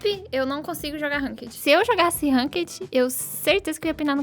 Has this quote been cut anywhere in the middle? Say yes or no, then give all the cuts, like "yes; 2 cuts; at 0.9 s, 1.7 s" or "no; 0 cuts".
yes; 1 cut; at 1.6 s